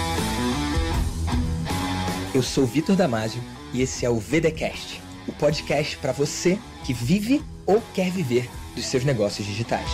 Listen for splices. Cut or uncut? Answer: uncut